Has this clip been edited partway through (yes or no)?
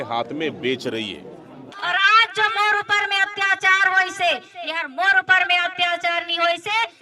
yes